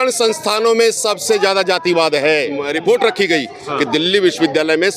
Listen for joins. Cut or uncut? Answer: cut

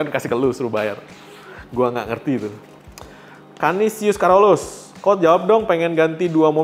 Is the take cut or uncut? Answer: uncut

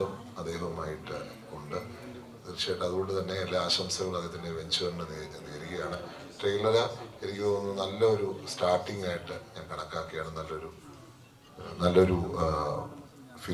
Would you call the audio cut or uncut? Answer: uncut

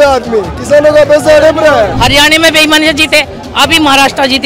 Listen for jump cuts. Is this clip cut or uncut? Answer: cut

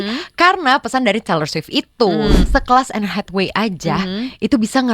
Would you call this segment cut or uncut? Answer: cut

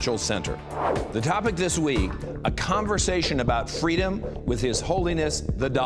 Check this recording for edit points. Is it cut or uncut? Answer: cut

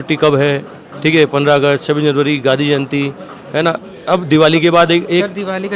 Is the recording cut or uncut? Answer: uncut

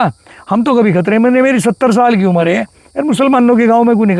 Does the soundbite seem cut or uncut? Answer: uncut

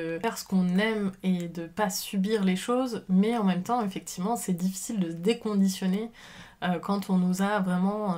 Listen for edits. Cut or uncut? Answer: uncut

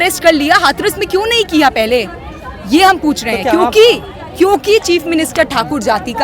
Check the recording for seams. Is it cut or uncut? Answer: uncut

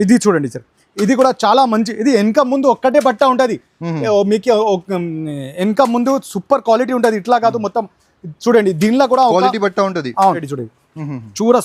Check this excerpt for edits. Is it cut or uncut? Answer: cut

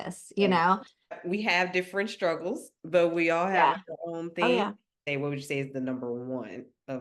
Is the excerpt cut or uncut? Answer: cut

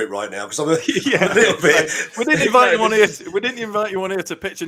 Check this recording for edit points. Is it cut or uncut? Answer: uncut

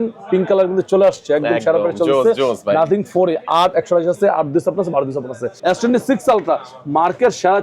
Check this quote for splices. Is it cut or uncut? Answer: cut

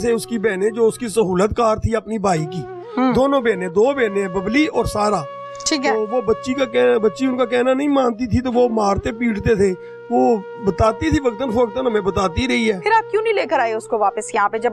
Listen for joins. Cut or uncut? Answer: uncut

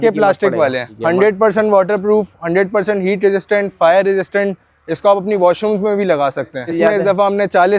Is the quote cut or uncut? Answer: cut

